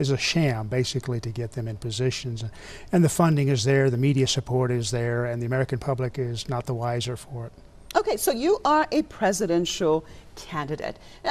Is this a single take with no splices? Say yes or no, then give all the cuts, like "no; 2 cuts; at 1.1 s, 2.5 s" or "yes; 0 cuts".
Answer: no; 1 cut; at 5.7 s